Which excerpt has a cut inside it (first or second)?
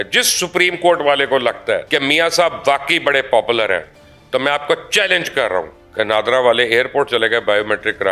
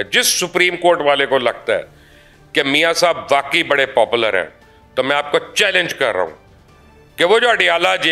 first